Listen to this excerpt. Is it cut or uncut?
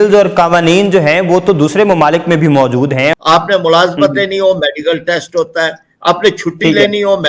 cut